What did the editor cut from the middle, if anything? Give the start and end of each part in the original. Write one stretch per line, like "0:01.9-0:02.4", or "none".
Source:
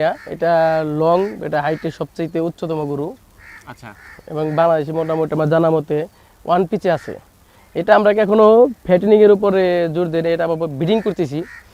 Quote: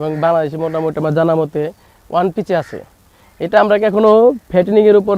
none